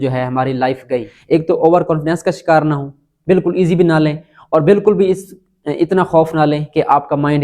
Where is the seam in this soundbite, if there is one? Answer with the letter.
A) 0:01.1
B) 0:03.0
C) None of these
A